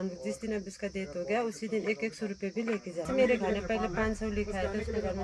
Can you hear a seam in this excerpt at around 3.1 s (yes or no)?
yes